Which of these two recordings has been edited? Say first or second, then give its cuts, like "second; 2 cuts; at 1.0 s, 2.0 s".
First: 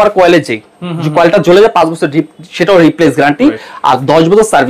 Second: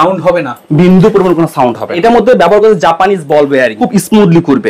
second; 2 cuts; at 2.0 s, 3.8 s